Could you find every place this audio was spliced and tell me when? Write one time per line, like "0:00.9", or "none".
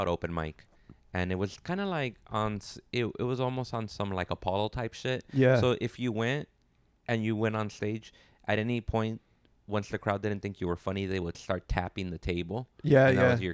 none